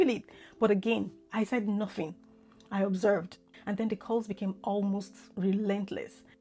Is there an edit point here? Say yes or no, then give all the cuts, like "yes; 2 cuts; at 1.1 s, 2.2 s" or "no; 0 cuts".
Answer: no; 0 cuts